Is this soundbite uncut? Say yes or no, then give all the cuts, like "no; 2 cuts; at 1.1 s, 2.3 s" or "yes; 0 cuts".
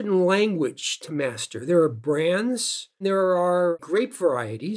no; 2 cuts; at 3.0 s, 3.8 s